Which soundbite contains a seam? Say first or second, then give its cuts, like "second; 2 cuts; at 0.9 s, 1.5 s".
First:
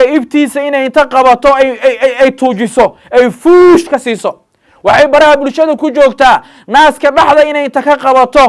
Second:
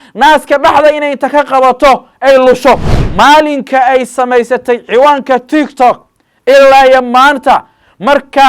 second; 1 cut; at 3.0 s